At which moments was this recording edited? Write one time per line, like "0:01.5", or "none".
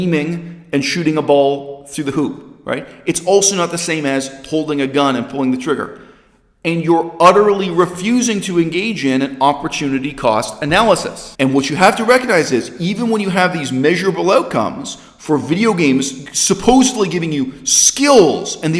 0:11.2